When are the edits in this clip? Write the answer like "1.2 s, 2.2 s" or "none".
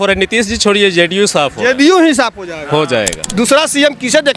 3.3 s